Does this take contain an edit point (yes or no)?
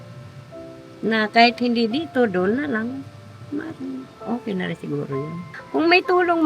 yes